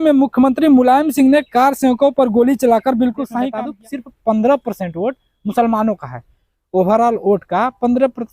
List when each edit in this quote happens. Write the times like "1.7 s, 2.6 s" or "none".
3.5 s